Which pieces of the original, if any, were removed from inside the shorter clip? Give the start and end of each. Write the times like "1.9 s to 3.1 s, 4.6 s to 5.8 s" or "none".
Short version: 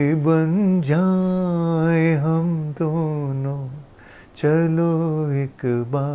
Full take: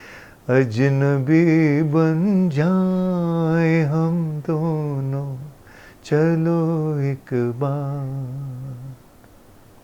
none

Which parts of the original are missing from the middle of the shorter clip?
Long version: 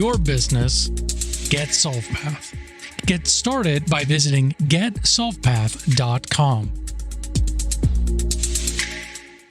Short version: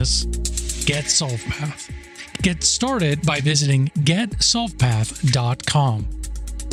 none

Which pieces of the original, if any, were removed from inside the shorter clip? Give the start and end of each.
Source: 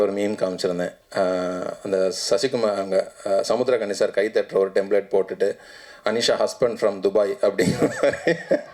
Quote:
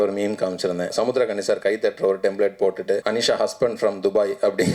0.9 s to 3.4 s, 5.6 s to 6.0 s

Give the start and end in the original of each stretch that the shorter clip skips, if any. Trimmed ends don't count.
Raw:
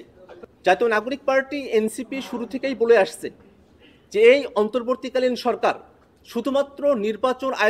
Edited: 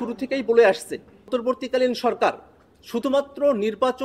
3.7 s to 4.8 s

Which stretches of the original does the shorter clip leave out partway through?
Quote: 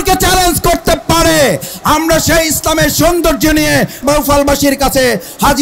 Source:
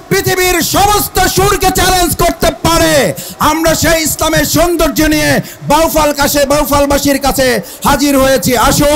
5.6 s to 6.5 s

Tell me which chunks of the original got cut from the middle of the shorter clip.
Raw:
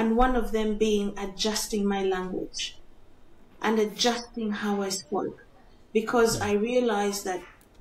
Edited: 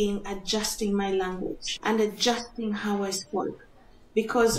2.6 s to 3.5 s

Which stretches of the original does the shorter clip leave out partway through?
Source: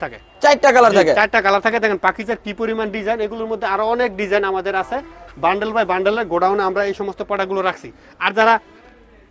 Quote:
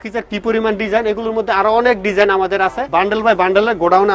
5.0 s to 5.3 s

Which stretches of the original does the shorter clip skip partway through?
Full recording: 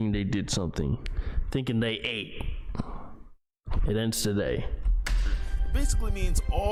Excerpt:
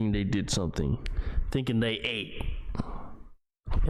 none

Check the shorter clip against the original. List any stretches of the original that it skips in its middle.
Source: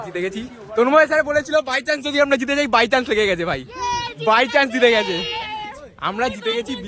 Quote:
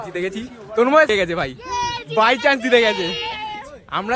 1.1 s to 3.2 s

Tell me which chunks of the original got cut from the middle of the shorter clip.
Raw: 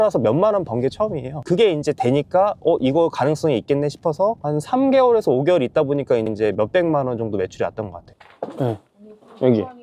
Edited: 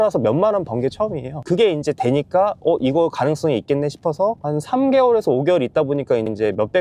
none

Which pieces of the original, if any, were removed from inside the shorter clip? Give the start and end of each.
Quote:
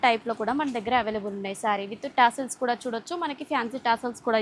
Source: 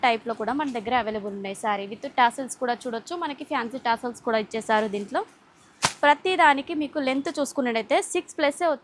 none

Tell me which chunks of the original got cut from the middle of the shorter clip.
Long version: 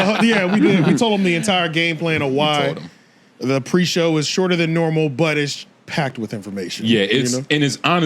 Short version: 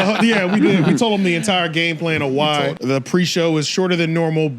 2.8 s to 3.4 s

